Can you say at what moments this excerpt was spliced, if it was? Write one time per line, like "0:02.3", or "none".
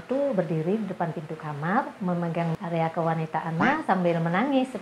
0:02.5